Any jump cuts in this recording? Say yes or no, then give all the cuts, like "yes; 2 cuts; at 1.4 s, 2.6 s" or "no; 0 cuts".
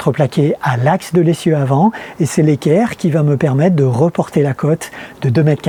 no; 0 cuts